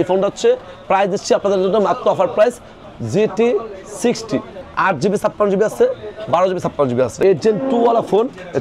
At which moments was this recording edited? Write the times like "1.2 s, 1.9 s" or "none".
2.8 s, 4.6 s, 7.1 s